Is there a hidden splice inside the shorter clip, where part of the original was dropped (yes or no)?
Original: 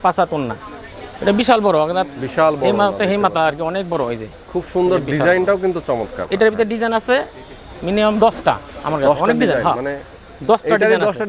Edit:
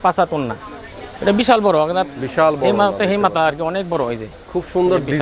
no